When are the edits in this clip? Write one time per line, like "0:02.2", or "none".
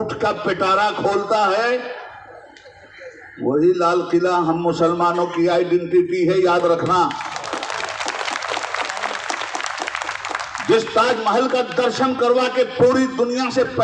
none